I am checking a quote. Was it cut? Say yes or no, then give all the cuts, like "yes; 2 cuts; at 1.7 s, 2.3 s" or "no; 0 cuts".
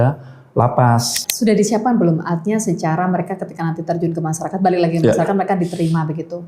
yes; 1 cut; at 1.2 s